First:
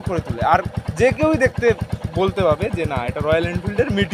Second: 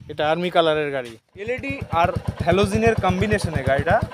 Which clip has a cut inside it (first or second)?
second